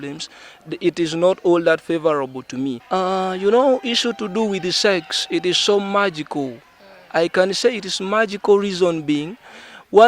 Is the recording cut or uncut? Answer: cut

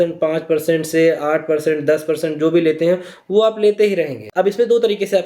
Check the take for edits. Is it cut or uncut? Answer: cut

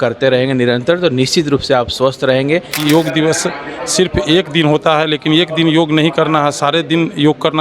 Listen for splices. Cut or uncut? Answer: cut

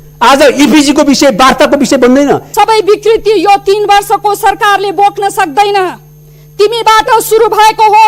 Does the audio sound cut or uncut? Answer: cut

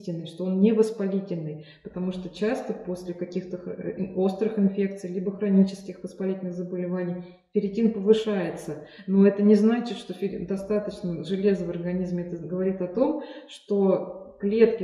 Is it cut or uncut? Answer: uncut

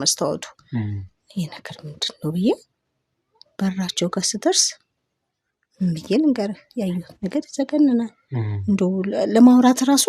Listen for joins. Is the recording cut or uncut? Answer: uncut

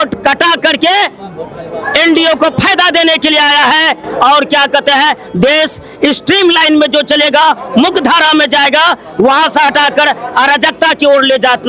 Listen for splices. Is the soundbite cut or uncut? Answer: uncut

